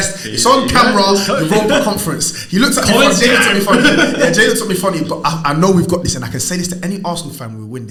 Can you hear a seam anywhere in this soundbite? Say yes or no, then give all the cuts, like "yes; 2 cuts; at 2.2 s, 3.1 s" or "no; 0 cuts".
no; 0 cuts